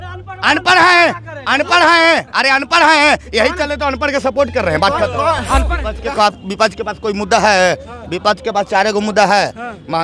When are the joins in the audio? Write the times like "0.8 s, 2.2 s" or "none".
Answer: 5.8 s

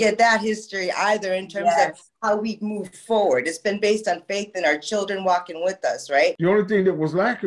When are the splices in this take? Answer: 6.4 s

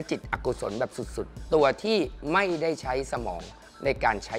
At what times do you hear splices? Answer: none

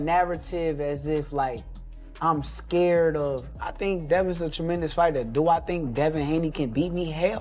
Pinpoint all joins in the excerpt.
5.3 s

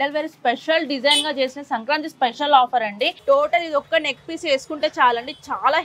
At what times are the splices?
3.2 s

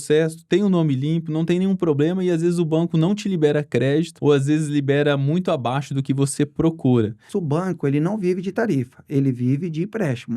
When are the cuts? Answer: 4.1 s, 7.3 s

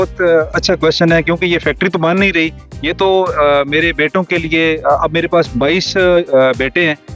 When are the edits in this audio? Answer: none

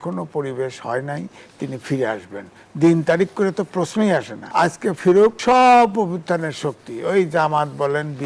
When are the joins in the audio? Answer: 4.4 s, 5.4 s

